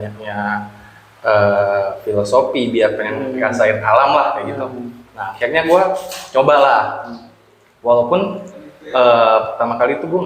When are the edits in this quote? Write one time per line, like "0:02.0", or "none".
none